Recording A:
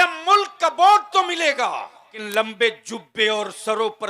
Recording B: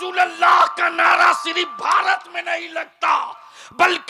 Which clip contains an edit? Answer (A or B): A